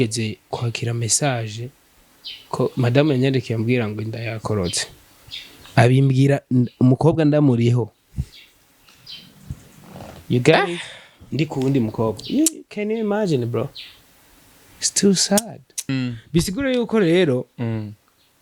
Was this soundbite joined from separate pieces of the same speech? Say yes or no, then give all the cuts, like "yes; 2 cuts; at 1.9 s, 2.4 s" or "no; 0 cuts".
yes; 1 cut; at 15.9 s